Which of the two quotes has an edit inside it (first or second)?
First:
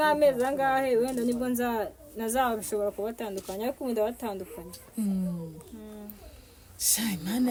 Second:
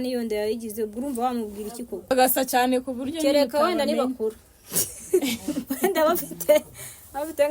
second